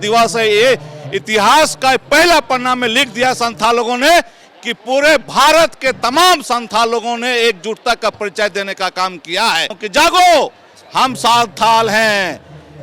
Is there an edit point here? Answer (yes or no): yes